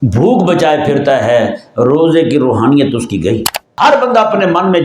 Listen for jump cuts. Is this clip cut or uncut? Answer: cut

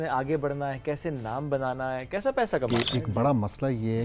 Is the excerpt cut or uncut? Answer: cut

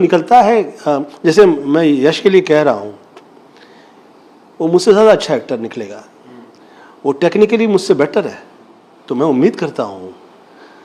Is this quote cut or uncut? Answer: uncut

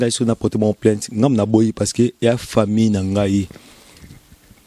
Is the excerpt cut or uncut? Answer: uncut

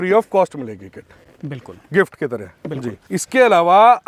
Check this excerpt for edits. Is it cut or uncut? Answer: uncut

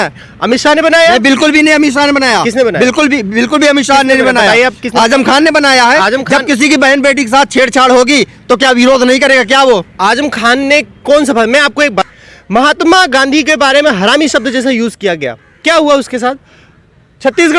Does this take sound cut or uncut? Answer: cut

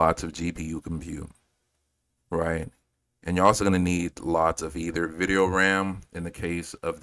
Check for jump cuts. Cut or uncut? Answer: uncut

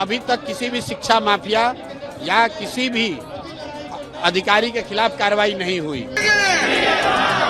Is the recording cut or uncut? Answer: cut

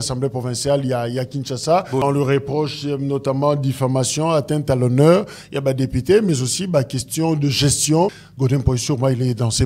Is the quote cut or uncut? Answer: cut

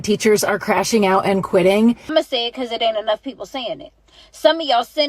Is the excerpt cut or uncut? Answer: cut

